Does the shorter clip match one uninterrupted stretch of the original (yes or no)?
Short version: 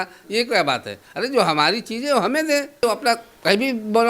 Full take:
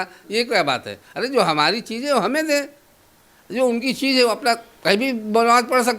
no